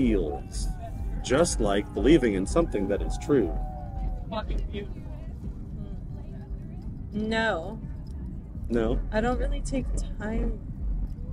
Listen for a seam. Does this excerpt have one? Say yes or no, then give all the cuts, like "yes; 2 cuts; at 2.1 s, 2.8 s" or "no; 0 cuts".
no; 0 cuts